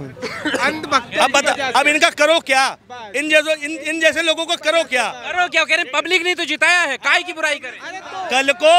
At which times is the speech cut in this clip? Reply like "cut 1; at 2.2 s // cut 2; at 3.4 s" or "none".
none